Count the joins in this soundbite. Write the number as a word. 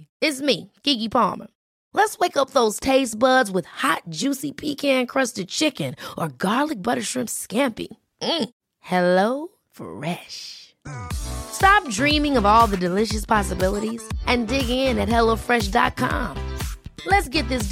zero